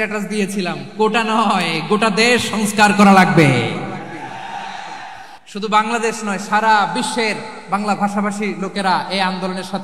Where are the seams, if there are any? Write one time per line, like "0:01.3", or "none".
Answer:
0:05.3